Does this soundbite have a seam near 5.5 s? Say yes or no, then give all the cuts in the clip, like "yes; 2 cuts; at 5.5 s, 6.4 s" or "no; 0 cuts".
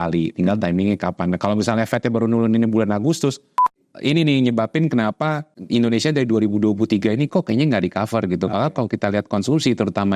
yes; 2 cuts; at 3.8 s, 5.5 s